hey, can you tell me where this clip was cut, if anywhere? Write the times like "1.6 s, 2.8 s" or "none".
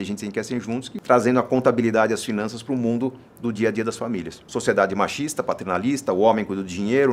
0.9 s, 4.4 s